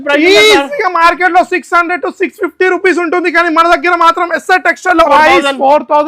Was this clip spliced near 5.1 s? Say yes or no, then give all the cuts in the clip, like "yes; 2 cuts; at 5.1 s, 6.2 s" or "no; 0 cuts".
yes; 1 cut; at 5.1 s